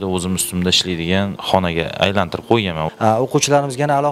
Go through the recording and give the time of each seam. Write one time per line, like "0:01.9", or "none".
0:01.4
0:02.9

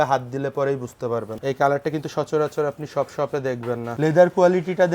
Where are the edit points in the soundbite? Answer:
0:01.4
0:03.9

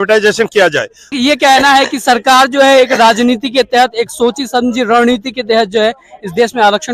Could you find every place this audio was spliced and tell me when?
0:01.0

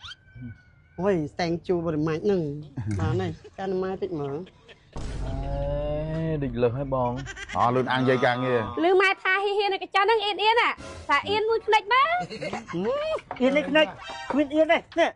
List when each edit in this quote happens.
0:03.5
0:07.3

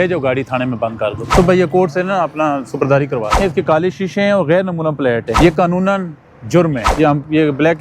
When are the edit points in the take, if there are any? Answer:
0:01.2
0:03.4
0:05.3
0:06.8

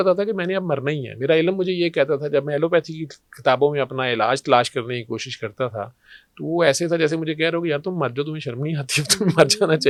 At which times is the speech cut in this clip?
none

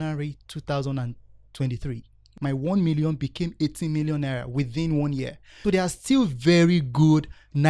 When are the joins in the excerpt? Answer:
0:02.4
0:05.4

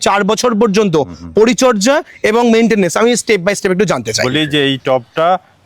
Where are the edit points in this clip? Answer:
0:04.2

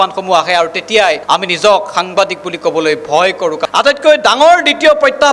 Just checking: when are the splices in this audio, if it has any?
0:03.6

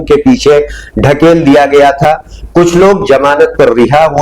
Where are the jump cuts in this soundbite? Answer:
none

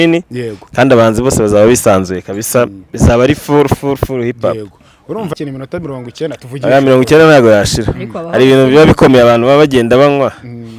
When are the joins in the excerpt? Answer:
0:05.3

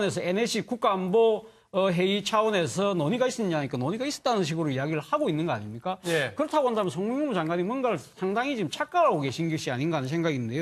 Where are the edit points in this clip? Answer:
none

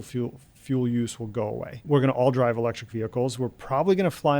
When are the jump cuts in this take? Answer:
0:01.9

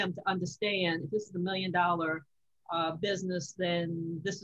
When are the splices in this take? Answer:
none

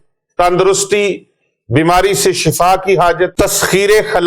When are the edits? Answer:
0:03.3

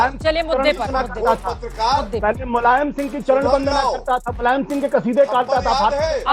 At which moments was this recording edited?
none

